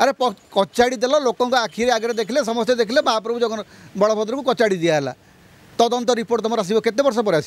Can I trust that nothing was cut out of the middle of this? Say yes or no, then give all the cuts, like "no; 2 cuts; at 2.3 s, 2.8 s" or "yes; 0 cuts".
yes; 0 cuts